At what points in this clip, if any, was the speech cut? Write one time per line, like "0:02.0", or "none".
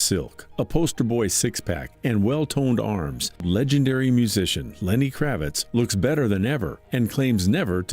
0:03.4